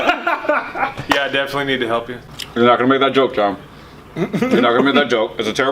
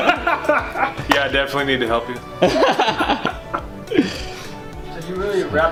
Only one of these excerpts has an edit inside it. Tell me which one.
first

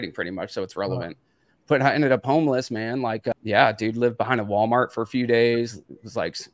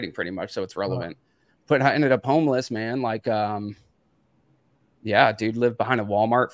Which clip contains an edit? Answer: first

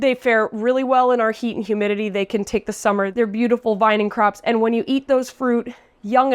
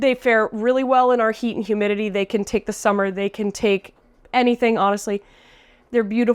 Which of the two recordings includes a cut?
first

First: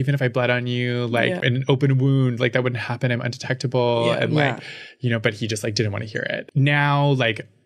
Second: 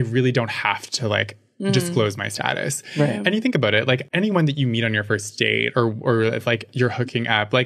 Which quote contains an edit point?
first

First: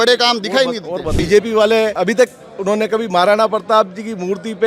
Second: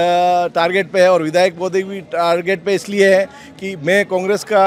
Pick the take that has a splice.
first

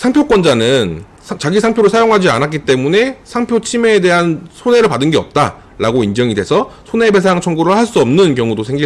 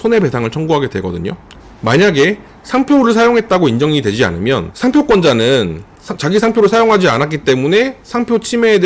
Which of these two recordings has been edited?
second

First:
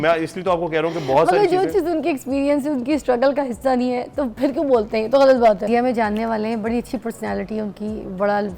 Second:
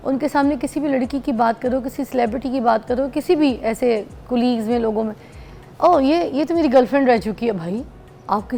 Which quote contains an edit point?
first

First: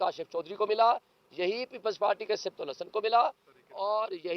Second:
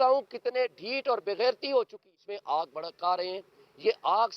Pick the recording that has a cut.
second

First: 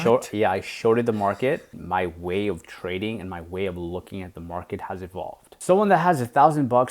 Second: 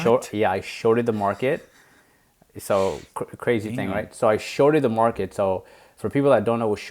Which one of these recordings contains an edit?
first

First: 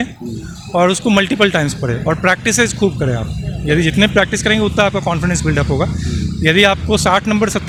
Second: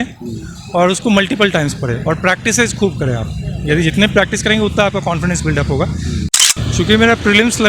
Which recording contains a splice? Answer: second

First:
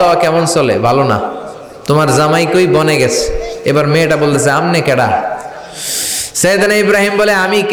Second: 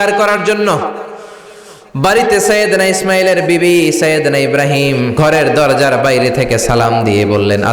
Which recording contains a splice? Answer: second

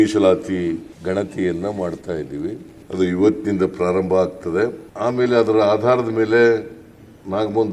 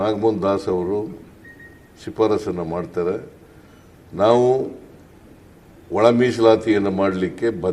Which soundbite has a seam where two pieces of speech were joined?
first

